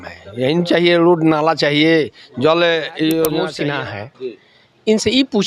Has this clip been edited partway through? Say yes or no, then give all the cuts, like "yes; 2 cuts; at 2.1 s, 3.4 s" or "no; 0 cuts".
yes; 1 cut; at 3.4 s